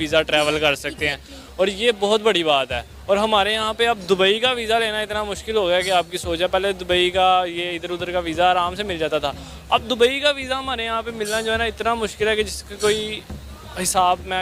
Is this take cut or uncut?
uncut